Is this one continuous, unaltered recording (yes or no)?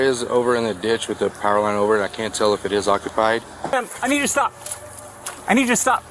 no